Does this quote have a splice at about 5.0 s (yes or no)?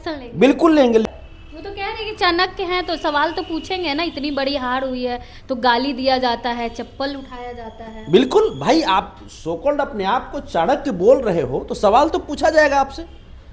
no